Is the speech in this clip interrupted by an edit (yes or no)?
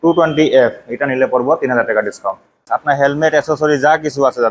yes